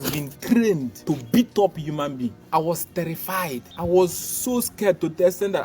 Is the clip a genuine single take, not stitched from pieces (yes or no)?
no